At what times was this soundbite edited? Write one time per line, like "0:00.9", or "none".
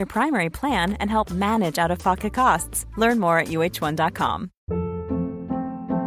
0:04.5